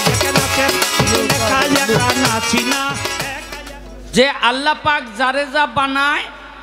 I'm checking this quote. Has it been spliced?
yes; 1 cut; at 3.4 s

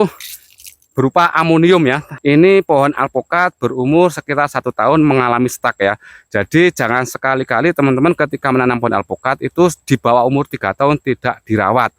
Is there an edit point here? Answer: yes; 1 cut; at 2.1 s

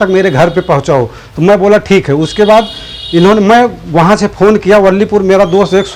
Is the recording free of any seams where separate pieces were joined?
yes; 0 cuts

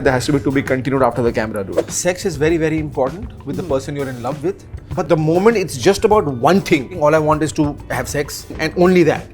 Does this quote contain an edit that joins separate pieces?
yes; 3 cuts; at 1.8 s, 6.9 s, 8.5 s

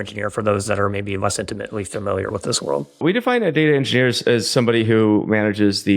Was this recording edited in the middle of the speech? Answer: yes; 1 cut; at 3.0 s

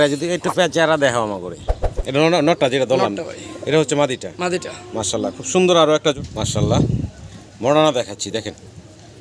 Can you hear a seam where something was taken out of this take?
yes; 1 cut; at 6.1 s

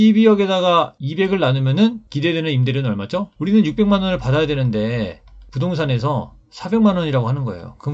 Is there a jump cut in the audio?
yes; 1 cut; at 3.3 s

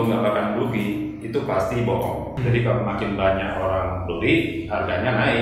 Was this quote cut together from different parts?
yes; 1 cut; at 2.3 s

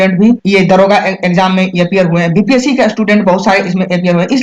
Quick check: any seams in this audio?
no; 0 cuts

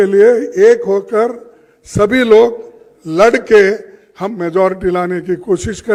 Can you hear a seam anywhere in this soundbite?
no; 0 cuts

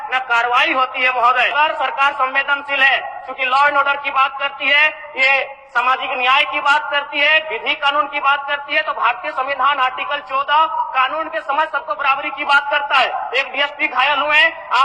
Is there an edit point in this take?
yes; 1 cut; at 1.5 s

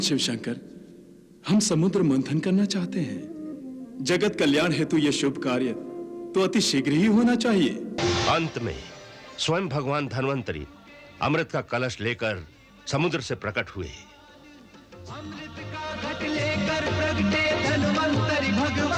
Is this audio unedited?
no; 1 cut; at 8.0 s

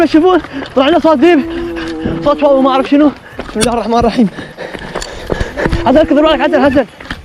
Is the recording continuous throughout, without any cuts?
yes; 0 cuts

